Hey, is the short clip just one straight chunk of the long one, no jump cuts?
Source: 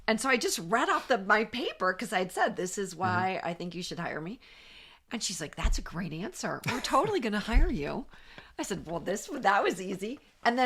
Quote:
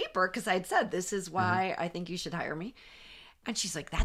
yes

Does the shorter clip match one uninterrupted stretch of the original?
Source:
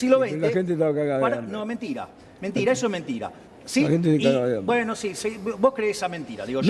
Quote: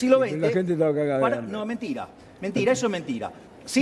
yes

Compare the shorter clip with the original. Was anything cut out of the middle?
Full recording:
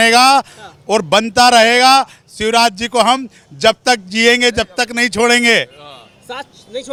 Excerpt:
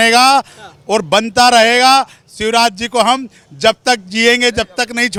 no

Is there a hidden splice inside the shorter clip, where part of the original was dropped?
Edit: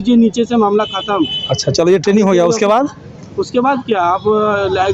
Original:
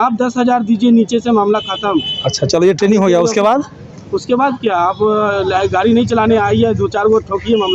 no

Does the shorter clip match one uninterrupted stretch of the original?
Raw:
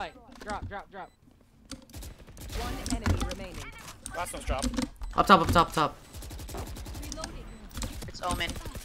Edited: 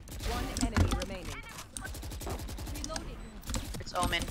no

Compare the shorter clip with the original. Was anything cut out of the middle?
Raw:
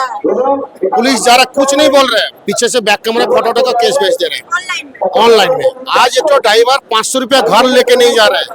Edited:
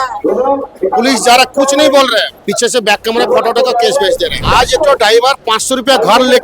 yes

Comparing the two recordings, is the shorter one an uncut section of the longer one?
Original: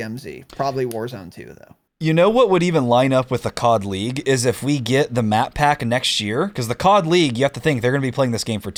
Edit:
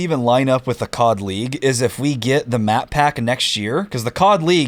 yes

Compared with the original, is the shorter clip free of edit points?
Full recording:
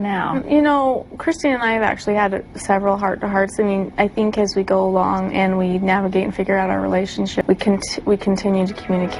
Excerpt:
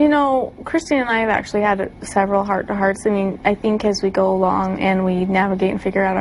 yes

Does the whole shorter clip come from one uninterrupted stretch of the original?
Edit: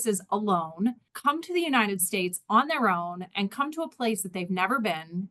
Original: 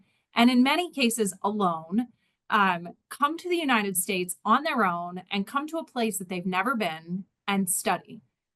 no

